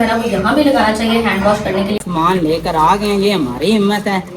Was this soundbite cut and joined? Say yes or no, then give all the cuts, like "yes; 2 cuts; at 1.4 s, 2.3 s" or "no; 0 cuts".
yes; 1 cut; at 2.0 s